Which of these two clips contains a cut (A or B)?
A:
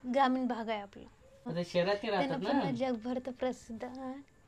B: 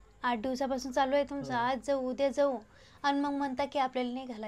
A